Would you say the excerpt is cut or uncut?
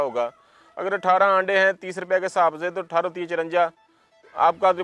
uncut